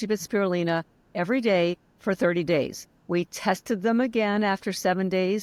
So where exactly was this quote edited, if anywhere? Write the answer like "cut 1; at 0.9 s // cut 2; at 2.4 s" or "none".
none